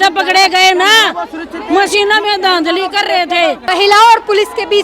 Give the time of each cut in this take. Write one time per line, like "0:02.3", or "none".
0:03.6

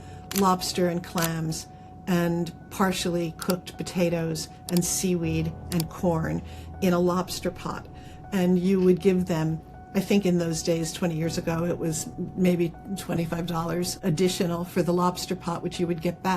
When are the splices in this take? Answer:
0:14.0

